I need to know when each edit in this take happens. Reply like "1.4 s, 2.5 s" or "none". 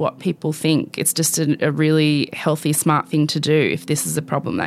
none

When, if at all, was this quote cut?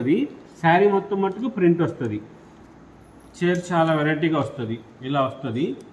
none

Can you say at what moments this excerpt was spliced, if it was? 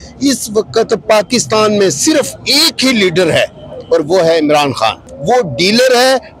5.0 s

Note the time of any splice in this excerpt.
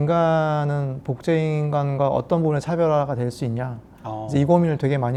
none

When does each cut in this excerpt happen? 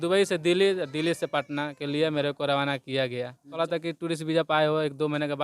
3.6 s

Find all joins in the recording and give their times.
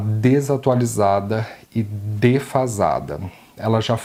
none

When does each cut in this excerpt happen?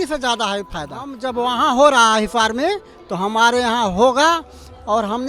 1.1 s

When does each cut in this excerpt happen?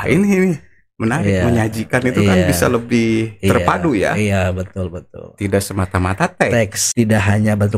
6.8 s

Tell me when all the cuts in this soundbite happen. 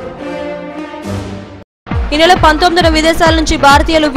1.1 s

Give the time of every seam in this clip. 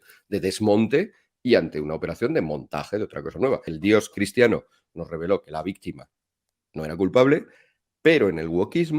3.7 s

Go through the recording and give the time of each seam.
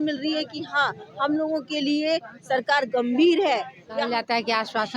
4.0 s

